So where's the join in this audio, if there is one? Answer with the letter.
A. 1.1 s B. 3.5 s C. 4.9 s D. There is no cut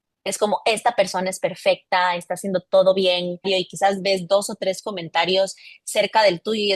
B